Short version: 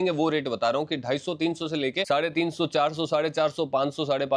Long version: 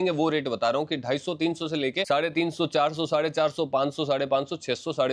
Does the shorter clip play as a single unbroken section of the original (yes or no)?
yes